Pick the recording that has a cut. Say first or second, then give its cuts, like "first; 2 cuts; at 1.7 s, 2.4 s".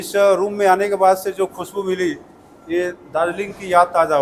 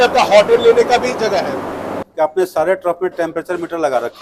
second; 1 cut; at 2.0 s